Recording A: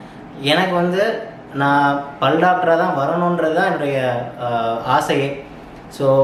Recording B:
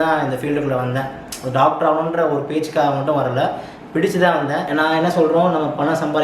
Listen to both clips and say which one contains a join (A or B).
B